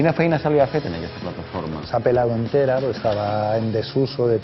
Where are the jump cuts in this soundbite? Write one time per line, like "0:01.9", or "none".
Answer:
none